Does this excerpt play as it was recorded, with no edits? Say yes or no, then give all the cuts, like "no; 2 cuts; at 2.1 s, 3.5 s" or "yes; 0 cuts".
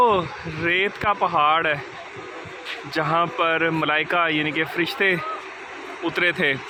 yes; 0 cuts